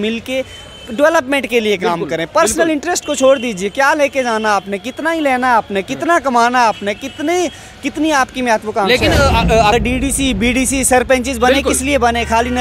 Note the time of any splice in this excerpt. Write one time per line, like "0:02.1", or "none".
0:09.7